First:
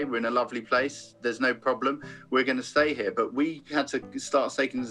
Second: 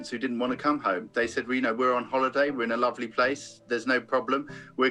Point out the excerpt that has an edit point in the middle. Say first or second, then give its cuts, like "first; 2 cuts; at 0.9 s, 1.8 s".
first; 1 cut; at 3.6 s